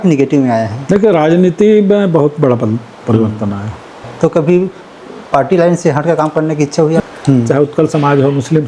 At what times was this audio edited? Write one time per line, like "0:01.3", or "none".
0:04.1
0:07.0